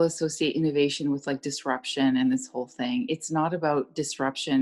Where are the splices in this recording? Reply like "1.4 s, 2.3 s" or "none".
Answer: none